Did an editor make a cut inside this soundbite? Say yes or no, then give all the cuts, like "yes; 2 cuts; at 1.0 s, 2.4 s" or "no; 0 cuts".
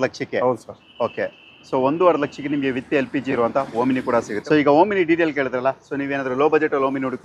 no; 0 cuts